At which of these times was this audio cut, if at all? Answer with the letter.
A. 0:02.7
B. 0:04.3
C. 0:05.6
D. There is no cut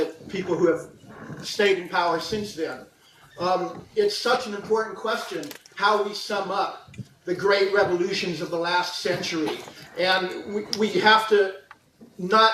D